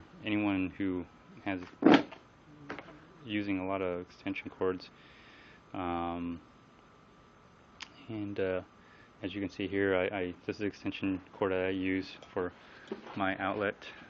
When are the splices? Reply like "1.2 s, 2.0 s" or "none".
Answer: 10.6 s